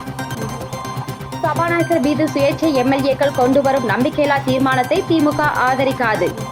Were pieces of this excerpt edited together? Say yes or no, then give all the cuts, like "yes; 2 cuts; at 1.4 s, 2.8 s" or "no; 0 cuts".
yes; 1 cut; at 1.0 s